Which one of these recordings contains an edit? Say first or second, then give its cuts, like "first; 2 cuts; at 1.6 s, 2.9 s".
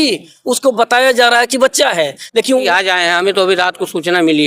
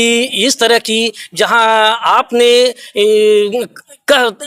first; 1 cut; at 2.6 s